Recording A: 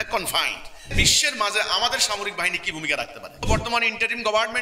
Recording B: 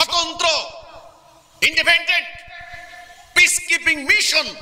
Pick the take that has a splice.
A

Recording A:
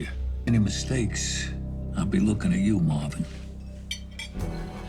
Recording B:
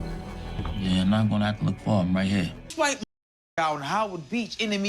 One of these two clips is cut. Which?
B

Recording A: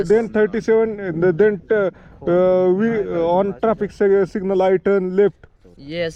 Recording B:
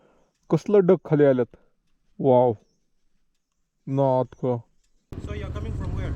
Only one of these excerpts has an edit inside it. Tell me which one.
B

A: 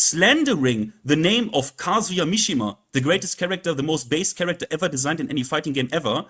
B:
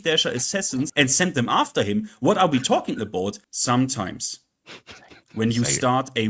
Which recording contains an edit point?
B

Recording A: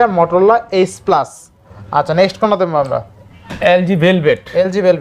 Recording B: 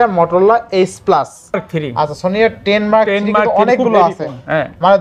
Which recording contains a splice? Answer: B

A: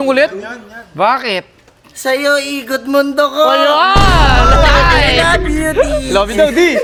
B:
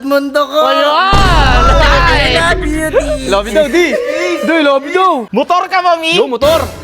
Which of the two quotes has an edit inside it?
B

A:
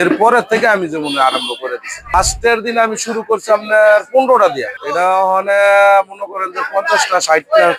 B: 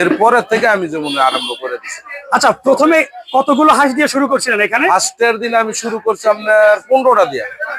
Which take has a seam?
A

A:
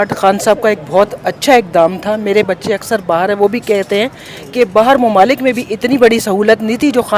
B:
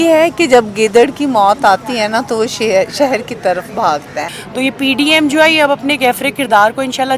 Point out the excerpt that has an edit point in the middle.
B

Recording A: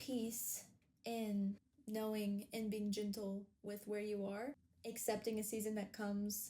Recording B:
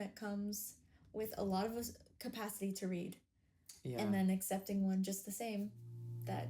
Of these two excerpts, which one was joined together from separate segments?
A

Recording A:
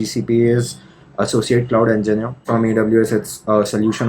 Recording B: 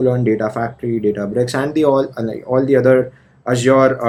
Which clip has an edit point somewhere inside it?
A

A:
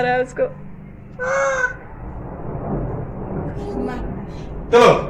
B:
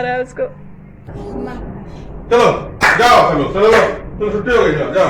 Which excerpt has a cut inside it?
B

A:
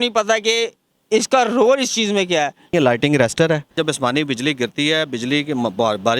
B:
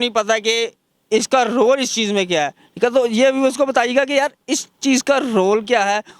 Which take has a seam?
A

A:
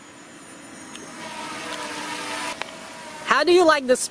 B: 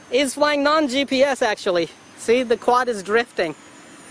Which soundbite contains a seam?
A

